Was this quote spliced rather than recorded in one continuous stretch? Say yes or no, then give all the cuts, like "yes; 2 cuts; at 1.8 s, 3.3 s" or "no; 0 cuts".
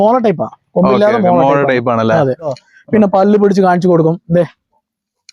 yes; 1 cut; at 2.5 s